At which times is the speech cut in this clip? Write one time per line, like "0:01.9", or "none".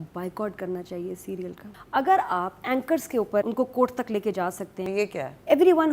0:01.7
0:03.5
0:04.7

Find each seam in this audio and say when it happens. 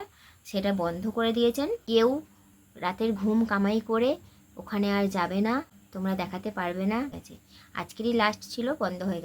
0:01.8
0:07.2

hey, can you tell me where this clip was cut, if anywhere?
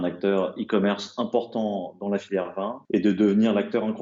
0:02.8

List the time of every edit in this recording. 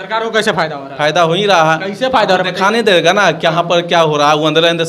none

